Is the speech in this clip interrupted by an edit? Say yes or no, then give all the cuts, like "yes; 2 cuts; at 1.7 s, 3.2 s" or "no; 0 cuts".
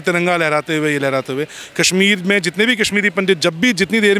no; 0 cuts